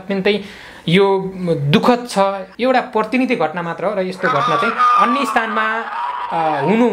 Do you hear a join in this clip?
yes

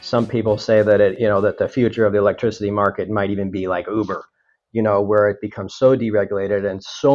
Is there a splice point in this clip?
yes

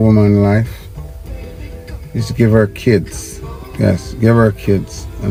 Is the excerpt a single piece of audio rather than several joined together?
yes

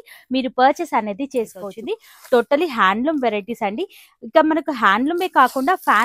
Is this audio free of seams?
no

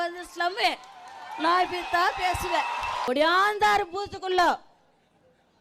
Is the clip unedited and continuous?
no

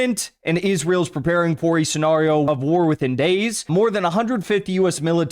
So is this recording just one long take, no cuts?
no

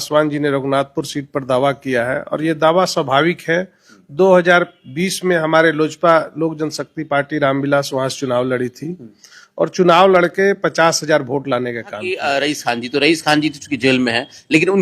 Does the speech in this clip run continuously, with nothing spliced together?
no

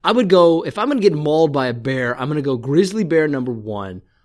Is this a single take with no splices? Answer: yes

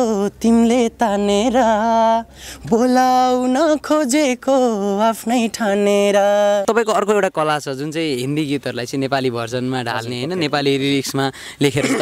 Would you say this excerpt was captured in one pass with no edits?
no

